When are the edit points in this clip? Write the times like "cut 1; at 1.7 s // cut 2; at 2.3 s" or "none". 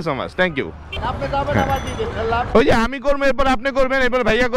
cut 1; at 0.9 s